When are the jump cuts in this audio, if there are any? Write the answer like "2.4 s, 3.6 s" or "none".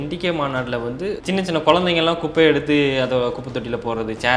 1.2 s